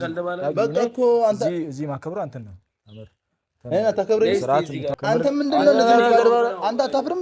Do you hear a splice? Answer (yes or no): yes